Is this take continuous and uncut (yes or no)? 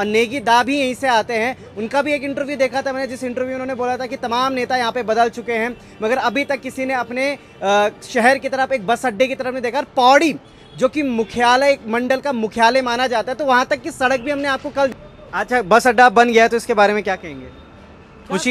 no